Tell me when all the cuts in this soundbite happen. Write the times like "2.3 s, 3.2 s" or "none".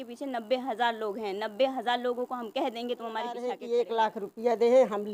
3.6 s